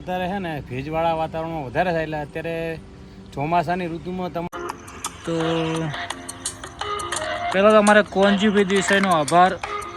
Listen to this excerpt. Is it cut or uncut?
cut